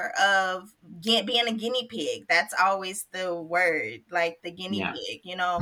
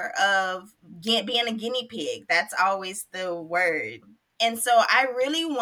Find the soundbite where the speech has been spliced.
second; 1 cut; at 4.0 s

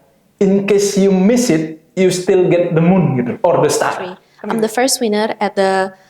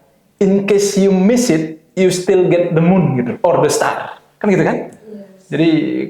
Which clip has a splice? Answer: first; 1 cut; at 4.2 s

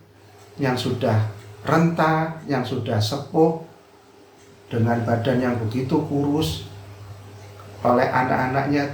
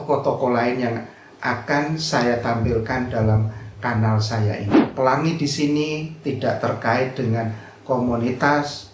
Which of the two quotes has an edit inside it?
second; 1 cut; at 4.6 s

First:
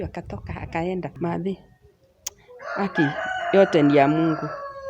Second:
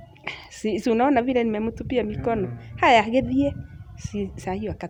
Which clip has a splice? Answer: first; 1 cut; at 1.1 s

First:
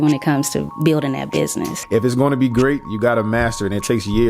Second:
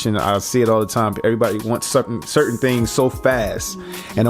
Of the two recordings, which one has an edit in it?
first; 1 cut; at 1.8 s

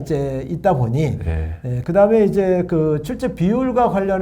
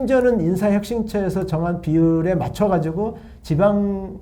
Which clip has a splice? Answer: first; 1 cut; at 1.8 s

